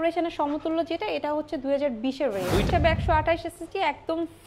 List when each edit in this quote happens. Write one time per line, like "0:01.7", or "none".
0:02.6